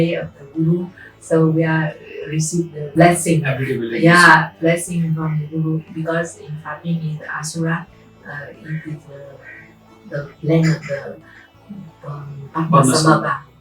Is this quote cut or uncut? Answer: uncut